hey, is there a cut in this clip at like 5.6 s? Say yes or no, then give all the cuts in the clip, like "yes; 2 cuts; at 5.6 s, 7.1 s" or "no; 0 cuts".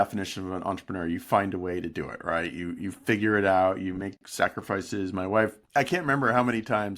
yes; 1 cut; at 5.6 s